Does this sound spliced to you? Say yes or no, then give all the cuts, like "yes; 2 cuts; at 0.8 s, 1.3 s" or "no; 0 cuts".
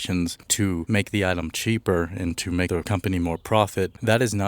yes; 2 cuts; at 0.8 s, 2.7 s